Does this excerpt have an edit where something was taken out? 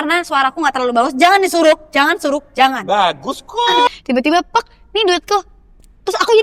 yes; 1 cut; at 3.9 s

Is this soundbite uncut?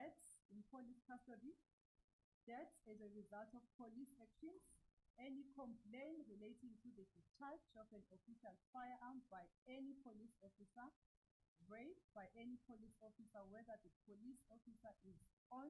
yes; 0 cuts

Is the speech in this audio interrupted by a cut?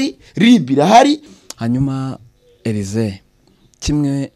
yes; 1 cut; at 1.3 s

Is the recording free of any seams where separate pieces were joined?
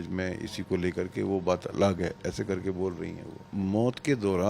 no; 1 cut; at 3.5 s

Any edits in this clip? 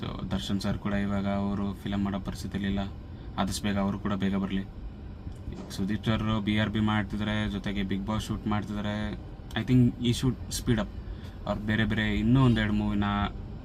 no; 0 cuts

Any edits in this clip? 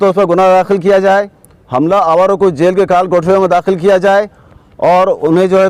no; 0 cuts

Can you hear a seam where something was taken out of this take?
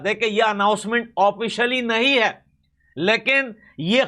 no; 0 cuts

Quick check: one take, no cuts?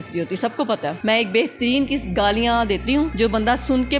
no; 2 cuts; at 1.0 s, 3.1 s

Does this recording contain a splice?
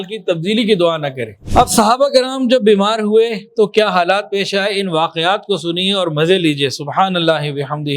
yes; 1 cut; at 1.4 s

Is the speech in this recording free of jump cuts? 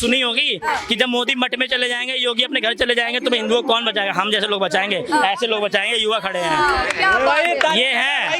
yes; 0 cuts

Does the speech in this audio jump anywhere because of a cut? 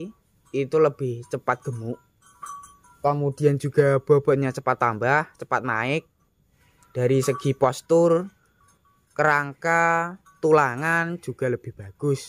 no; 0 cuts

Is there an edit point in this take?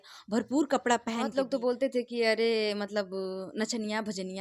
yes; 1 cut; at 1.4 s

